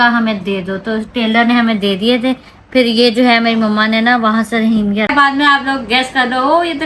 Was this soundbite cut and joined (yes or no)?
yes